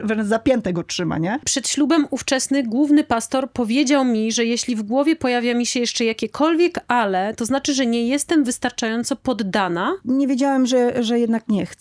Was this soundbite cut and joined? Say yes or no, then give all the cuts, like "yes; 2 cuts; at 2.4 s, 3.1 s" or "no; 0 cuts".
yes; 2 cuts; at 1.6 s, 10.0 s